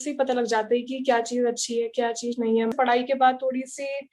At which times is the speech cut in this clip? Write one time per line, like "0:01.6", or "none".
0:02.7